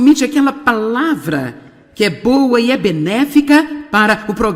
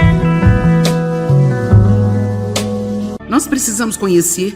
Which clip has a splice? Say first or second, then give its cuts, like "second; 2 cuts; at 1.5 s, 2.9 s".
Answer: second; 1 cut; at 3.2 s